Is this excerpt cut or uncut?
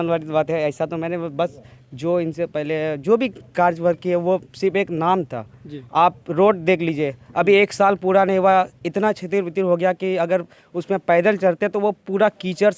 uncut